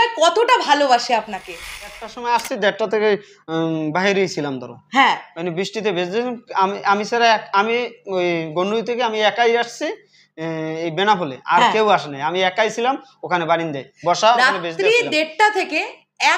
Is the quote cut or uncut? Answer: cut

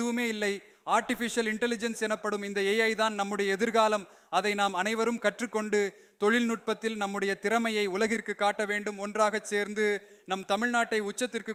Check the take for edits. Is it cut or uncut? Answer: uncut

